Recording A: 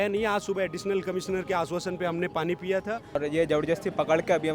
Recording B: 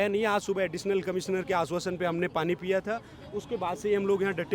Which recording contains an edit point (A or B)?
A